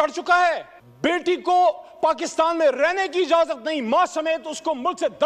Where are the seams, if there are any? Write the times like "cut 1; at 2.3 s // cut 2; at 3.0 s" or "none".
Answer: none